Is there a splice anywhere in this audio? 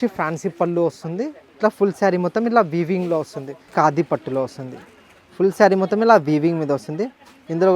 yes; 2 cuts; at 1.4 s, 3.7 s

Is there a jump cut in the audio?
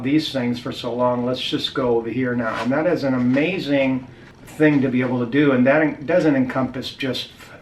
no; 0 cuts

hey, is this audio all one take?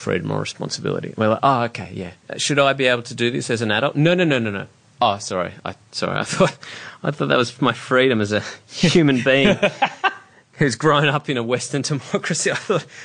no; 2 cuts; at 2.3 s, 4.8 s

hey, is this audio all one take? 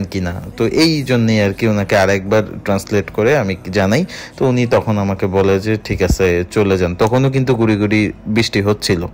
yes; 0 cuts

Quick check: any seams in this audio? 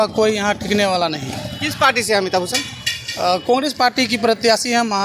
no; 0 cuts

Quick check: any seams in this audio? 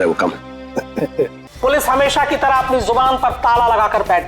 yes; 1 cut; at 1.4 s

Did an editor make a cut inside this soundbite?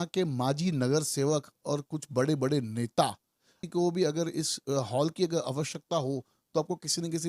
yes; 1 cut; at 3.5 s

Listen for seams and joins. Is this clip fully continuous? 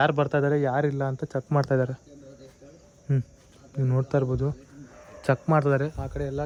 yes; 0 cuts

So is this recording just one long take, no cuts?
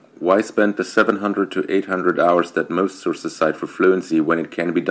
yes; 0 cuts

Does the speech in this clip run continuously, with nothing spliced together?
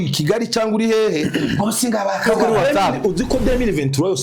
no; 1 cut; at 2.3 s

